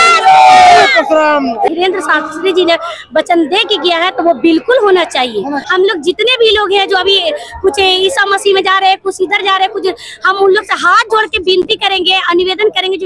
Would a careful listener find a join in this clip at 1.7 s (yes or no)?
yes